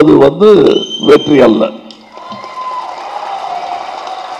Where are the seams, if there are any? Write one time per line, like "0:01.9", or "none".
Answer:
none